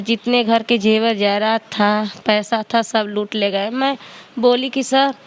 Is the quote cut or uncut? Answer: uncut